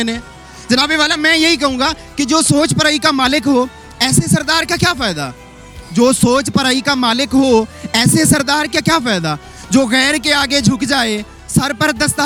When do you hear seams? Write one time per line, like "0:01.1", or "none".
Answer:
none